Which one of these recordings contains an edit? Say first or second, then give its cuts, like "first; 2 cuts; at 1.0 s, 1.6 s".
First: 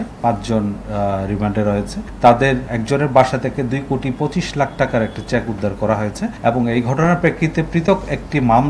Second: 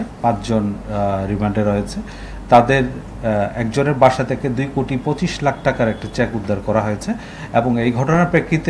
first; 3 cuts; at 2.0 s, 2.7 s, 6.3 s